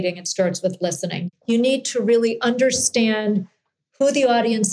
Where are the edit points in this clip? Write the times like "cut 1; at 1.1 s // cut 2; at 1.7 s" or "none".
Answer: cut 1; at 1.1 s